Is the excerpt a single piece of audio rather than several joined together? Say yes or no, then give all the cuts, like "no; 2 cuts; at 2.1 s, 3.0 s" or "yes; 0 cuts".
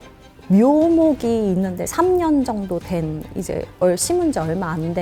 yes; 0 cuts